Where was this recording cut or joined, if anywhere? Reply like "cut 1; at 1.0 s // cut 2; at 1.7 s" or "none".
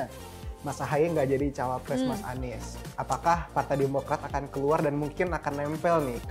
none